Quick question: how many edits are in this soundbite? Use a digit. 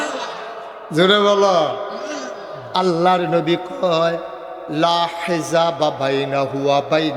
1